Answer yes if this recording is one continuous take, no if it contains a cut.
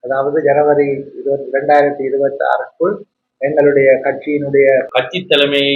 no